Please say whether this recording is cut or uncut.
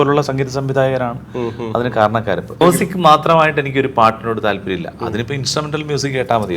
cut